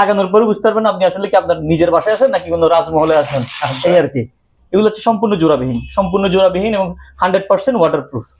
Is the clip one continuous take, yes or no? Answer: yes